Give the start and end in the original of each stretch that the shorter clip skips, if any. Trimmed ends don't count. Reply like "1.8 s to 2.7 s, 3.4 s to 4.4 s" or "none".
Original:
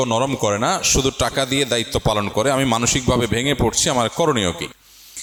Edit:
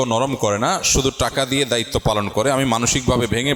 none